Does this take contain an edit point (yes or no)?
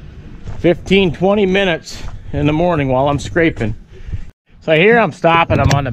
yes